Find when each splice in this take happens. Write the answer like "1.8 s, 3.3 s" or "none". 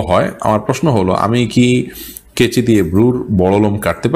none

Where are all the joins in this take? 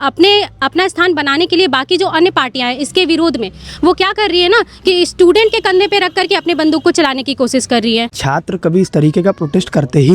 8.2 s

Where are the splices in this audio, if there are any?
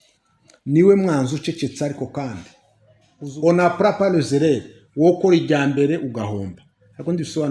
3.2 s

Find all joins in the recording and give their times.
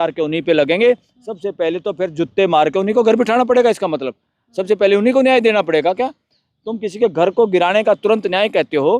none

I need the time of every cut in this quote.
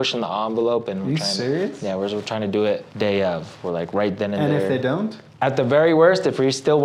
2.9 s, 5.2 s

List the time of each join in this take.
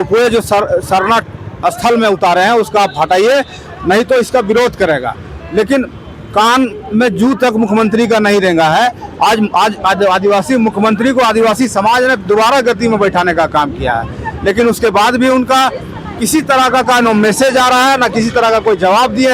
none

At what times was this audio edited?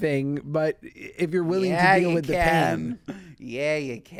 none

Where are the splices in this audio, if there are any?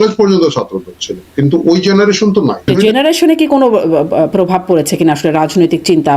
2.7 s

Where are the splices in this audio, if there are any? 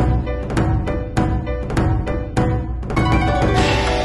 2.0 s

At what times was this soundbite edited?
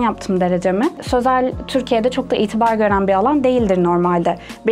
1.0 s

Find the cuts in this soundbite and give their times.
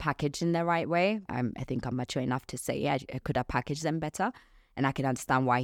1.3 s

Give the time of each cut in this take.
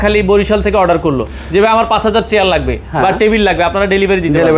none

